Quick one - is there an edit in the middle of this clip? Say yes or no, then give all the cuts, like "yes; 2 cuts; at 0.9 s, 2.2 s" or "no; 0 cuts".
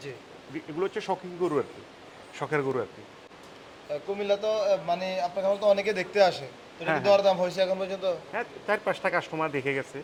no; 0 cuts